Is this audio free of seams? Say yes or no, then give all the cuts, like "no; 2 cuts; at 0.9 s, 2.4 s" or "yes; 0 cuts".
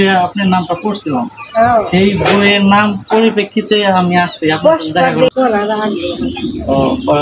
no; 1 cut; at 5.3 s